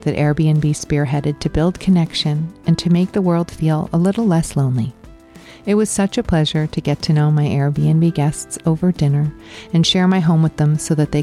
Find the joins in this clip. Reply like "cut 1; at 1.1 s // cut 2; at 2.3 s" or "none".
none

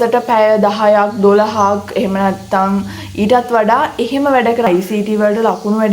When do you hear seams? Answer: cut 1; at 4.7 s

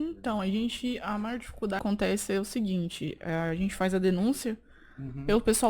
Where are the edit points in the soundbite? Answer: cut 1; at 1.8 s

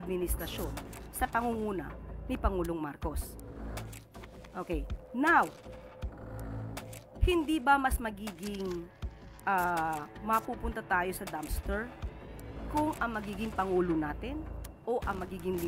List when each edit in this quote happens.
cut 1; at 3.2 s // cut 2; at 4.5 s // cut 3; at 5.5 s // cut 4; at 7.2 s

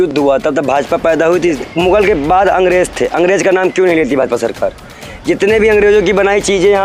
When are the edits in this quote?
cut 1; at 1.6 s

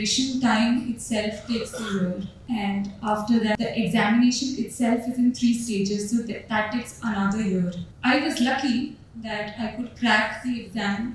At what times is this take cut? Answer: cut 1; at 2.3 s // cut 2; at 3.6 s // cut 3; at 7.9 s

